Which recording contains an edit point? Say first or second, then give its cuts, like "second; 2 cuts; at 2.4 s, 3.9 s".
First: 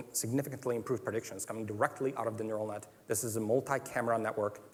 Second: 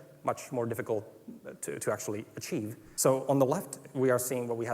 second; 1 cut; at 2.8 s